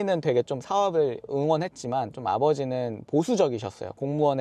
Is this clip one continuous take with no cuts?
yes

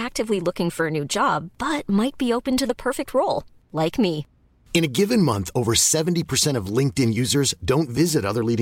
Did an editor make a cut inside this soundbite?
no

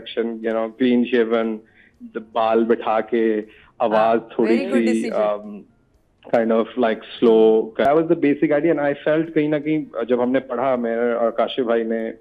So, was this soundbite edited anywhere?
yes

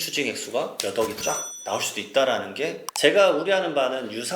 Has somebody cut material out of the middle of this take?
yes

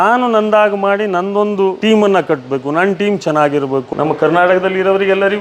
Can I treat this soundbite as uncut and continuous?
no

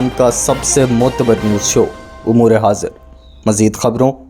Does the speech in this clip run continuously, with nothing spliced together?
yes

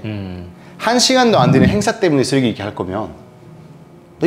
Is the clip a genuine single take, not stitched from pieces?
yes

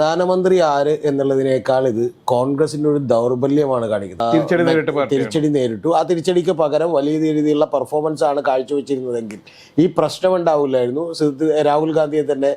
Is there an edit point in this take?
yes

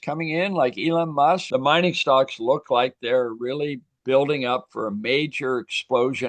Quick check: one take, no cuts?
no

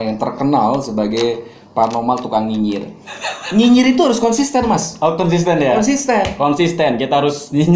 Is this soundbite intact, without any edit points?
no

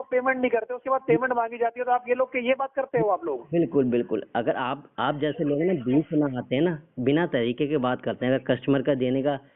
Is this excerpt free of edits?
yes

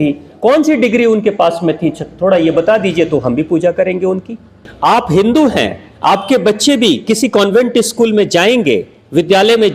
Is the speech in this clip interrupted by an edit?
yes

